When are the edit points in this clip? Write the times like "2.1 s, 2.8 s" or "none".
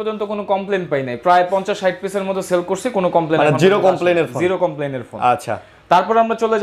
none

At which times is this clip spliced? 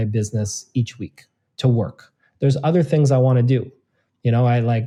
none

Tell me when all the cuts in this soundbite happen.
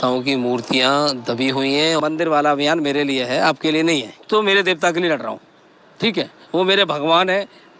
2.0 s, 4.2 s

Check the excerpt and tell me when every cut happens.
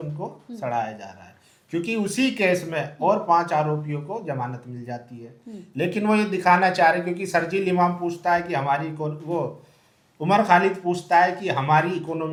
none

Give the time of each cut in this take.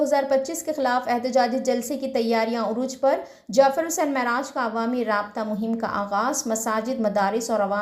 none

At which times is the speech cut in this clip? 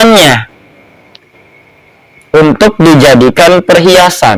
none

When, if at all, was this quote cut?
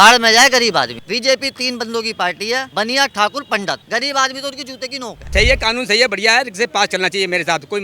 1.0 s, 2.7 s, 3.8 s, 5.3 s

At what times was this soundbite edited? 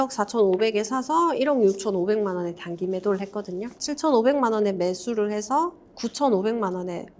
3.7 s

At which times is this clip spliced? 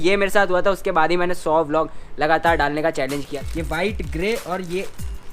3.2 s

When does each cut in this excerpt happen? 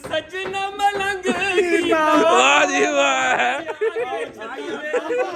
none

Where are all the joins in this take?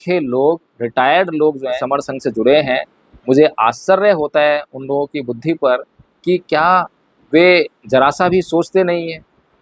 1.8 s

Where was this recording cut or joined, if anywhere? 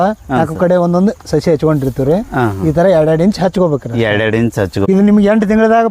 4.8 s

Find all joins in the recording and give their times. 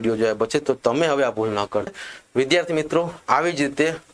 2.0 s

